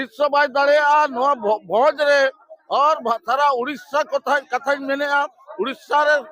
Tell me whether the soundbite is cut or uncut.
uncut